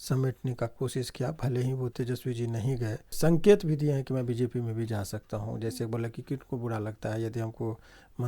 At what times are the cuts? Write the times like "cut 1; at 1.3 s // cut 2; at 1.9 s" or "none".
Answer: cut 1; at 1.9 s // cut 2; at 3.1 s